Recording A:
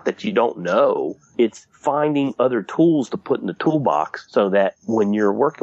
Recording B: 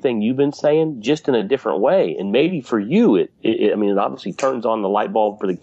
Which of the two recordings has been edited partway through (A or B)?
A